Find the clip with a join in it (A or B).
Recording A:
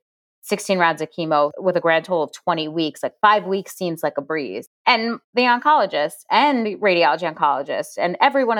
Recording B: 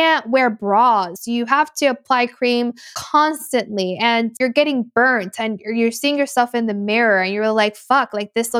B